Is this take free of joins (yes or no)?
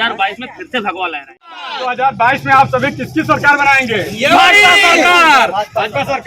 no